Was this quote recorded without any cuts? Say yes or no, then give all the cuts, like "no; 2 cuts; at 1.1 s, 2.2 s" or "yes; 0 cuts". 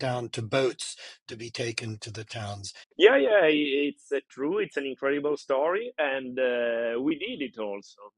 no; 1 cut; at 2.8 s